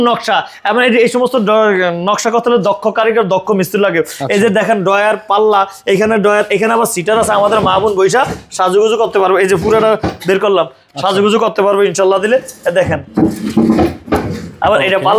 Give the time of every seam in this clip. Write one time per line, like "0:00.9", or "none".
none